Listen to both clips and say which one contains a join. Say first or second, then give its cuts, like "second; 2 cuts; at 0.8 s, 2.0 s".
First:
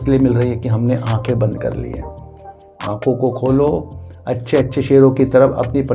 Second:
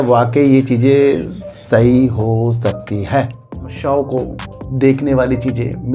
second; 1 cut; at 3.8 s